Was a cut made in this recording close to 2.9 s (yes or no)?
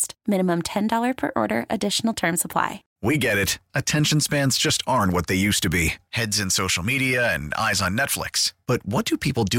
yes